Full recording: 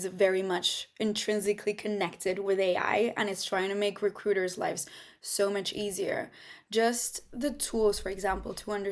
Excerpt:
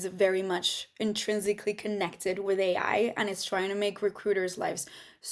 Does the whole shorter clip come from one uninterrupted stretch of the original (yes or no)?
yes